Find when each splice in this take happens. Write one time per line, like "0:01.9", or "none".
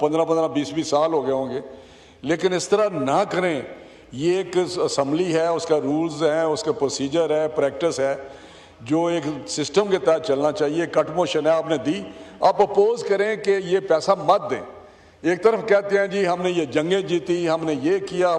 none